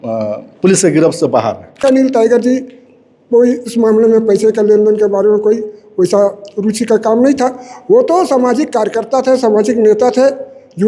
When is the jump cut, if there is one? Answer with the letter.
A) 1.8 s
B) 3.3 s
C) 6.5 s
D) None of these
A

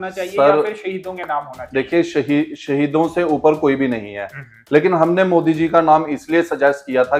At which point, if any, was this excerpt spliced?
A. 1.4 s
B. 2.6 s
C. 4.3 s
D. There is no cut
D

